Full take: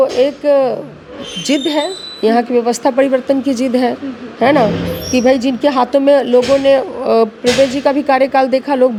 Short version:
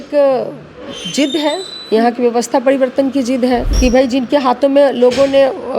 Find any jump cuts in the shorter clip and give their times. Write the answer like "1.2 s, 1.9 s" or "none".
3.7 s